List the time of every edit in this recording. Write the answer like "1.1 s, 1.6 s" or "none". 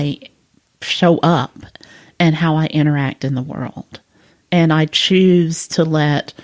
none

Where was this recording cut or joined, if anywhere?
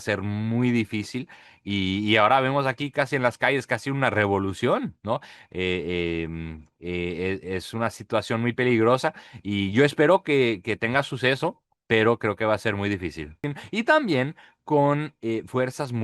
13.5 s

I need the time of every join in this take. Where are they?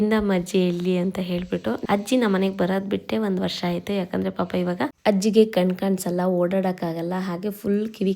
1.8 s, 5.0 s

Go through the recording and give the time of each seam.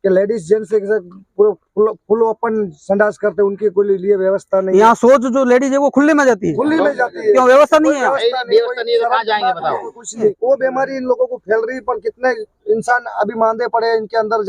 10.4 s

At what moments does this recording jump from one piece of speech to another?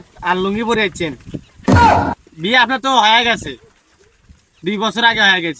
1.3 s, 2.3 s

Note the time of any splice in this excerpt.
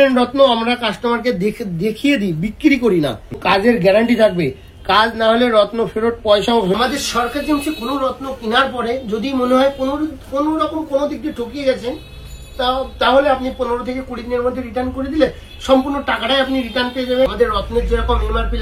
3.4 s, 6.8 s, 17.3 s

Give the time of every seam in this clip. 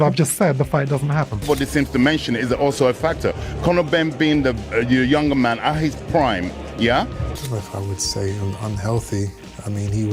1.5 s, 7.4 s

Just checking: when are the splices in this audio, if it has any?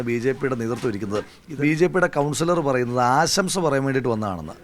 1.4 s

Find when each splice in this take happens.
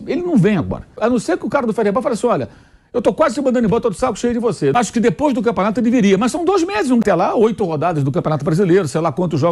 0.9 s, 4.8 s, 7.0 s

